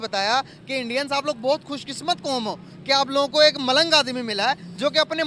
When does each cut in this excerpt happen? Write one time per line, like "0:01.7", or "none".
none